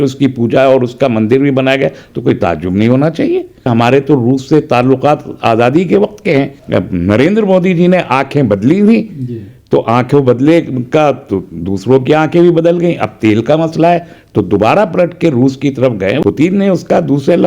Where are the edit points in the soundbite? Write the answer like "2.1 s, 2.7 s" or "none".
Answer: 3.7 s, 6.6 s, 16.2 s